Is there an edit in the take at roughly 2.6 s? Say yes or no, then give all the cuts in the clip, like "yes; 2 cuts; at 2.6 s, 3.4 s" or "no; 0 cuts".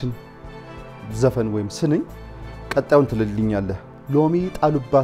no; 1 cut; at 3.9 s